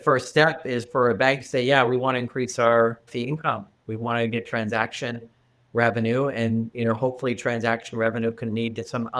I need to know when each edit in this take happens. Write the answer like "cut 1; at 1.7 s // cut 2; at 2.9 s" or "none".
cut 1; at 3.1 s